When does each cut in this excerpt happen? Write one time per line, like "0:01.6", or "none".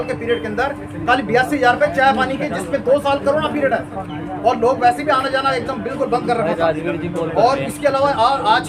none